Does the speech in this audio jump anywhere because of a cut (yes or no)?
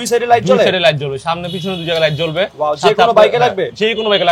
no